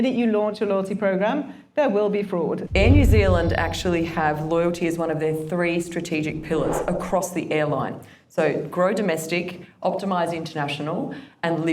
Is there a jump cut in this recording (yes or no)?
yes